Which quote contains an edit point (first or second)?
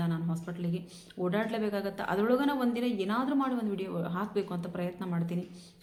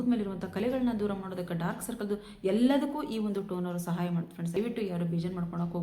second